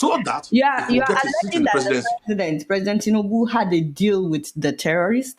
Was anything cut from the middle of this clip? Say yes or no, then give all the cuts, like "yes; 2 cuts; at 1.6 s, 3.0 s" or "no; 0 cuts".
no; 0 cuts